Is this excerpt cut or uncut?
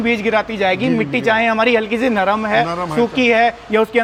uncut